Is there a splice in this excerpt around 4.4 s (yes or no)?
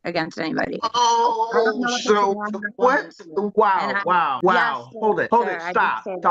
yes